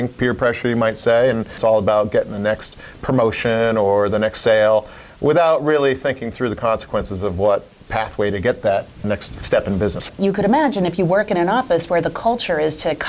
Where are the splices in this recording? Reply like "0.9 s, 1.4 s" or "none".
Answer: 1.6 s, 9.3 s, 10.0 s